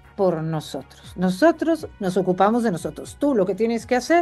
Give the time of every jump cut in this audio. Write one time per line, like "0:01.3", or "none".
none